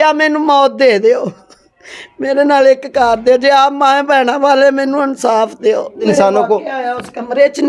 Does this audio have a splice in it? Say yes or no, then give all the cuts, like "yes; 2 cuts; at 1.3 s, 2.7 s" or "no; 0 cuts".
yes; 1 cut; at 6.1 s